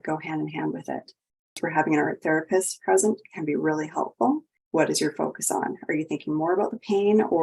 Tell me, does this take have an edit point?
yes; 2 cuts; at 1.6 s, 4.5 s

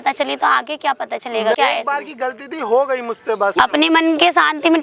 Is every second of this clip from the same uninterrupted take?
no; 2 cuts; at 1.6 s, 3.5 s

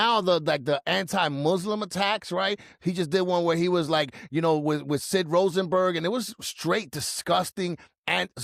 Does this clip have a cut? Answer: no; 0 cuts

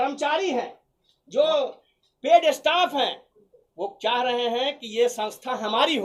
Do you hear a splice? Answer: no; 0 cuts

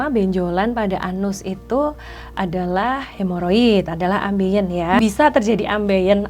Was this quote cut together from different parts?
yes; 1 cut; at 5.0 s

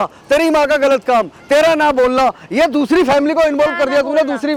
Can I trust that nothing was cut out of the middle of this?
yes; 0 cuts

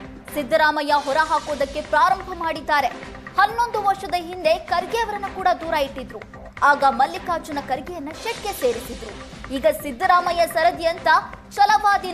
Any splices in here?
no; 0 cuts

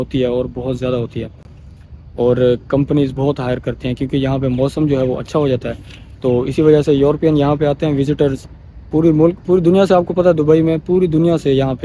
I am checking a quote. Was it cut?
no; 0 cuts

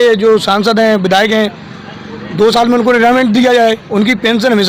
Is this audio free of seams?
yes; 0 cuts

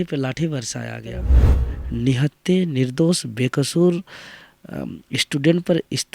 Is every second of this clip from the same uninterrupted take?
no; 1 cut; at 1.4 s

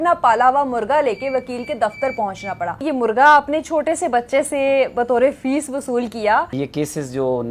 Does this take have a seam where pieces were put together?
yes; 2 cuts; at 2.8 s, 6.5 s

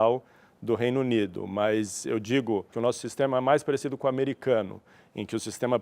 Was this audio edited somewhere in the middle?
yes; 1 cut; at 2.7 s

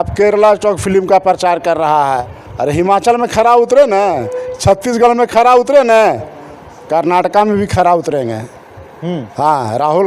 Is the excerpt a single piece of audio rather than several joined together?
no; 1 cut; at 2.2 s

